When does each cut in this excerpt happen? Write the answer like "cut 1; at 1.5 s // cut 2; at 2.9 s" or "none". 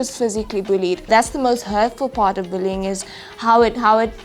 cut 1; at 1.1 s